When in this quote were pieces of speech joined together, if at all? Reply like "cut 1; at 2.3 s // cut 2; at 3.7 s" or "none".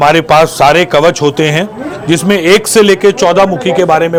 none